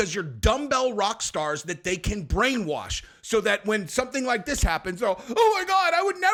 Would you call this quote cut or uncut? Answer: uncut